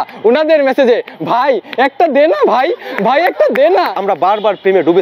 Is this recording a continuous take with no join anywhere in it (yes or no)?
no